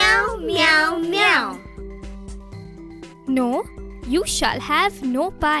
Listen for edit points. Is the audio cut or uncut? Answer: cut